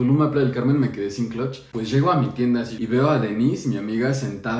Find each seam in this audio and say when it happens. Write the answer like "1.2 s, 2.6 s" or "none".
1.6 s, 2.7 s